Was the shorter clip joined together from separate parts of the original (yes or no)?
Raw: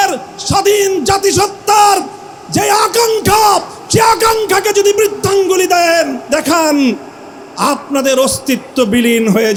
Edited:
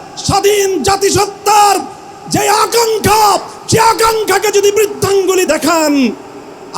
yes